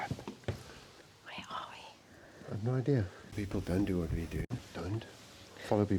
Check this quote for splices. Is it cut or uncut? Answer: cut